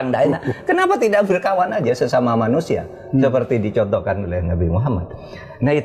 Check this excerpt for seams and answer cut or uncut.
uncut